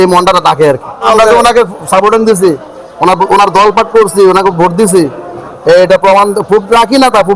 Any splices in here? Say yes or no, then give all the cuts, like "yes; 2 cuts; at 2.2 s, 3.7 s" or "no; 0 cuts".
yes; 1 cut; at 1.1 s